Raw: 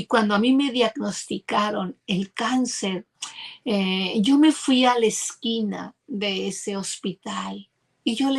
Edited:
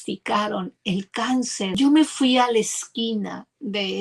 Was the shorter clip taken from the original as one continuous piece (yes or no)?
no